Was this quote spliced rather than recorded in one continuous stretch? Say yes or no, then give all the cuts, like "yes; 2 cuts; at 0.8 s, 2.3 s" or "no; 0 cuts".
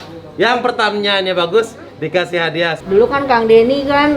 yes; 1 cut; at 2.8 s